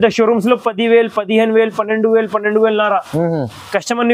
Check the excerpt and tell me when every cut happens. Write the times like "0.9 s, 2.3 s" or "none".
none